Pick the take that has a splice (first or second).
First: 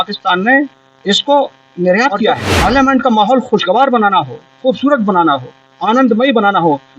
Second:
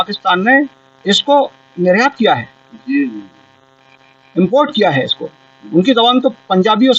first